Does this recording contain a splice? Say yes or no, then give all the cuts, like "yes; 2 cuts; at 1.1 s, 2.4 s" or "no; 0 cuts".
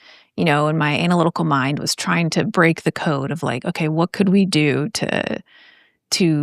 no; 0 cuts